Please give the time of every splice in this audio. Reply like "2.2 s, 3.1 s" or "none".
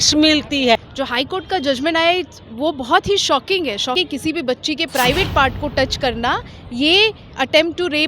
0.8 s, 3.9 s